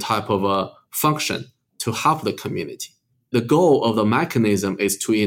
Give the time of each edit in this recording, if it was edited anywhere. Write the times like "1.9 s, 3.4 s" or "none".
3.1 s